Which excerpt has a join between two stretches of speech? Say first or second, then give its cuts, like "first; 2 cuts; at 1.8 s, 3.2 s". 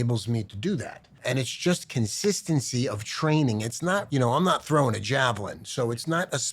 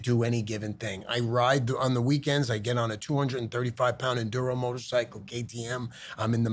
first; 1 cut; at 4.1 s